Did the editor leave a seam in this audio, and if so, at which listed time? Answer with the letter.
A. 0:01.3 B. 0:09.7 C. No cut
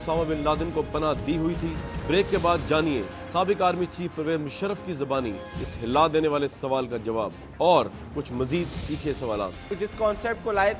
C